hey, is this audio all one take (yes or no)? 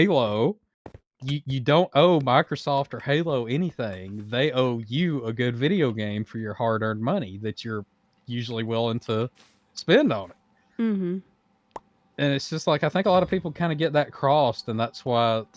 yes